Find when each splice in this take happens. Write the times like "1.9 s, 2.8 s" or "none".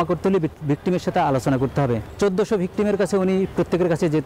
2.0 s